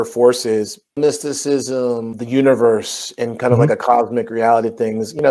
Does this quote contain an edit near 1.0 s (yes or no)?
yes